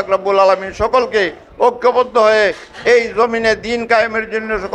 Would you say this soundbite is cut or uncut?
uncut